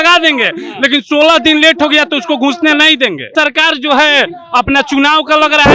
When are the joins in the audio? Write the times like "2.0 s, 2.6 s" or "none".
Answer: 3.3 s